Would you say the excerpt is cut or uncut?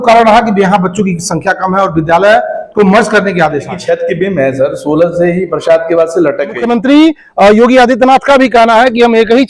cut